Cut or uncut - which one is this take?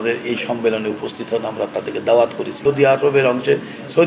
cut